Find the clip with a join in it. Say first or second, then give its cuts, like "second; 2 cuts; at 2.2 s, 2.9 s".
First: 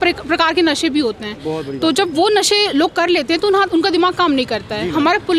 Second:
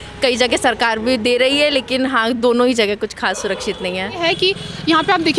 second; 1 cut; at 4.2 s